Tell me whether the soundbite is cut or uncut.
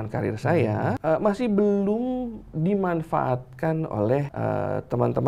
cut